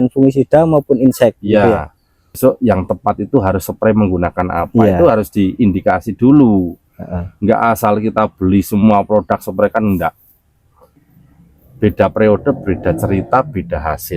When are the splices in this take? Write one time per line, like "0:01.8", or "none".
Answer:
0:02.3
0:11.0